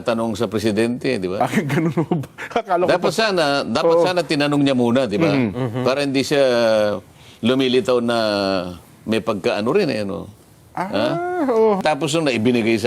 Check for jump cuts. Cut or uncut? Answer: cut